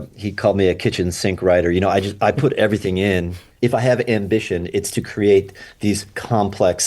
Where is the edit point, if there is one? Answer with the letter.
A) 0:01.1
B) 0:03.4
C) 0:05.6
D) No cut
B